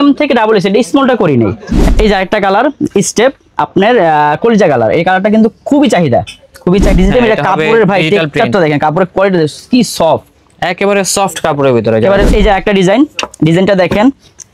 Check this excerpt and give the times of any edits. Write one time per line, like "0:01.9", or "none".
0:01.9
0:06.9
0:12.3